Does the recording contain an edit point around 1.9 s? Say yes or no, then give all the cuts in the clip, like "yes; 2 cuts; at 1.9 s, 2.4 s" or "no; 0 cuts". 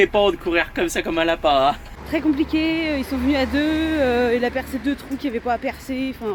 yes; 1 cut; at 1.9 s